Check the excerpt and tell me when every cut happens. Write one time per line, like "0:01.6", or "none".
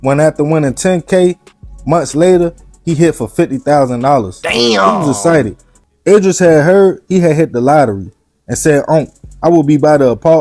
0:05.8